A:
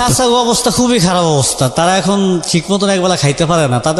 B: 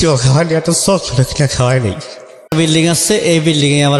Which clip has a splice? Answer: B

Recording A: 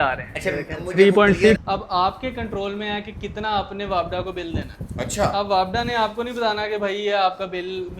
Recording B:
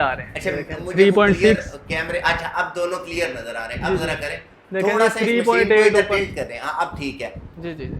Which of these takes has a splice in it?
A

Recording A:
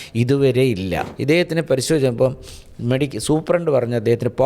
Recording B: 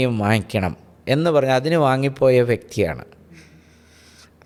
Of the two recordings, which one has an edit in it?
A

